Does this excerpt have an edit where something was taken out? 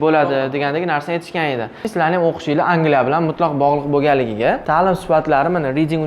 yes; 2 cuts; at 1.8 s, 4.6 s

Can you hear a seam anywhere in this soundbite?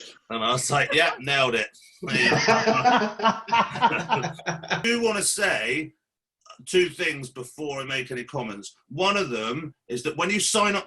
yes; 1 cut; at 4.8 s

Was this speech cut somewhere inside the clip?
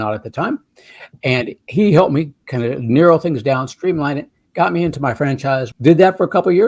yes; 1 cut; at 5.7 s

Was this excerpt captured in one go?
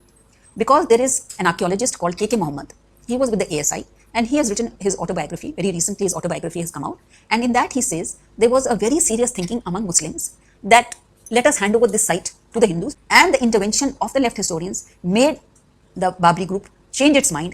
no; 1 cut; at 12.9 s

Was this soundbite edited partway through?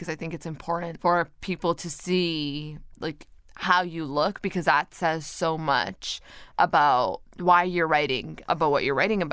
yes; 4 cuts; at 0.9 s, 2.9 s, 6.5 s, 8.3 s

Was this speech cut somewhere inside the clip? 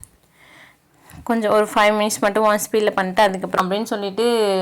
yes; 1 cut; at 3.6 s

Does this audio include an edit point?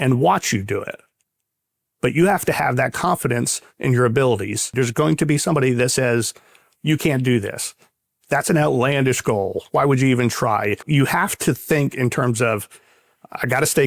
yes; 2 cuts; at 4.7 s, 10.9 s

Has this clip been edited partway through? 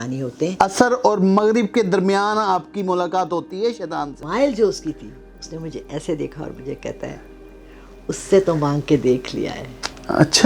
yes; 1 cut; at 4.2 s

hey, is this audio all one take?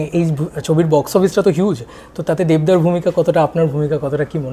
yes; 0 cuts

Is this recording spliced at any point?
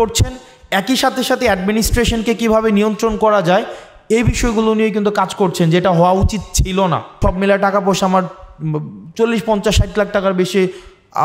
yes; 1 cut; at 7.2 s

